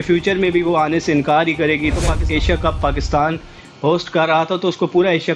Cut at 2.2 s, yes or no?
yes